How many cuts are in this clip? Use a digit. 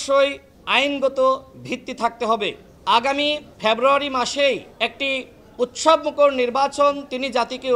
1